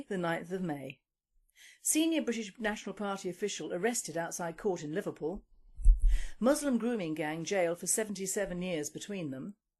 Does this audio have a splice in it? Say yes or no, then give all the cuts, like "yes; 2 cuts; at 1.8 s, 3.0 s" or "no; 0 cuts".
no; 0 cuts